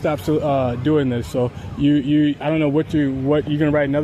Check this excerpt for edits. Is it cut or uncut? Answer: uncut